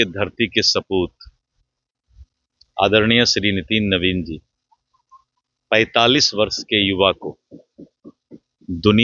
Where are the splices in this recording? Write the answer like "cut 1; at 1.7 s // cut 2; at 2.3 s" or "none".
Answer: none